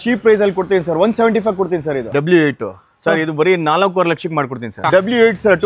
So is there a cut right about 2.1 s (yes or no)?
yes